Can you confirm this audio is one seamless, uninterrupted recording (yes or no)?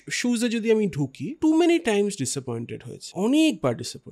no